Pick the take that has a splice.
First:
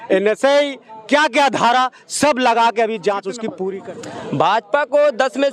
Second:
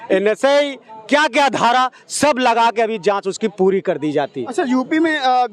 first; 1 cut; at 3.9 s

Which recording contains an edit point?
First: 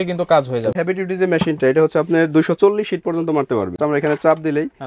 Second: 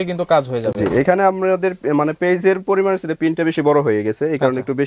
first; 2 cuts; at 0.8 s, 3.8 s

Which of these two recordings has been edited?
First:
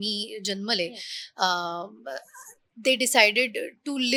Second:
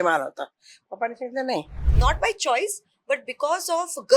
second; 1 cut; at 1.8 s

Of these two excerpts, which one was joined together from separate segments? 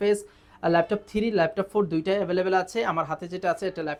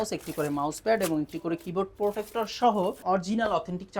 second; 1 cut; at 3.0 s

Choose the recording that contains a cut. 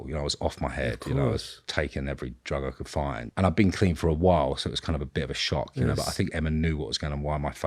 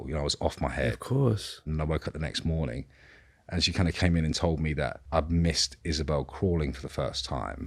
second; 2 cuts; at 1.7 s, 5.0 s

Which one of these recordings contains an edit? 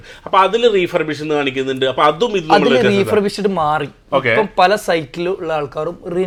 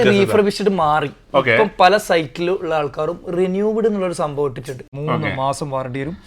second; 1 cut; at 4.8 s

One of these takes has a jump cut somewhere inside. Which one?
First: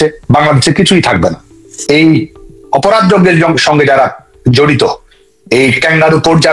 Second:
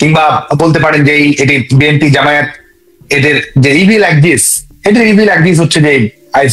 first; 1 cut; at 1.7 s

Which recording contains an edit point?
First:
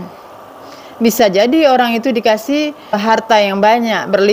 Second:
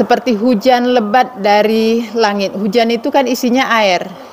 first; 1 cut; at 3.0 s

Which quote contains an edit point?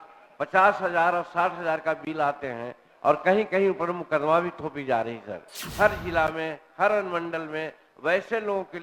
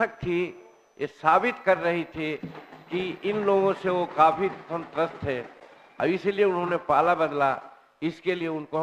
first; 1 cut; at 5.6 s

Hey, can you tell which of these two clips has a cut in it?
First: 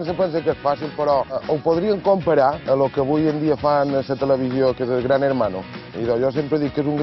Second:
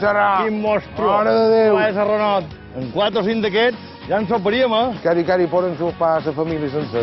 first; 2 cuts; at 1.4 s, 2.6 s

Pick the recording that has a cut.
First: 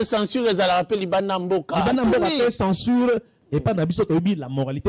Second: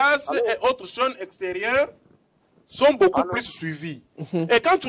first; 1 cut; at 3.3 s

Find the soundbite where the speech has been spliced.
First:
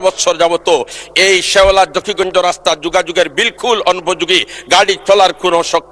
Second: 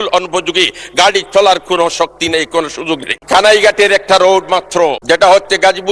second; 2 cuts; at 3.1 s, 5.0 s

